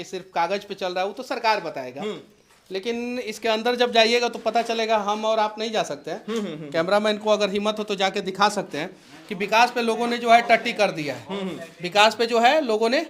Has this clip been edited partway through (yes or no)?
no